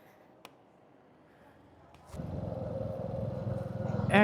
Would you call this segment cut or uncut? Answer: cut